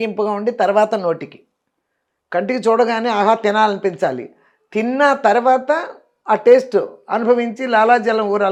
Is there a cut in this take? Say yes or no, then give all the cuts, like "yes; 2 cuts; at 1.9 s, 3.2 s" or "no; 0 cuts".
no; 0 cuts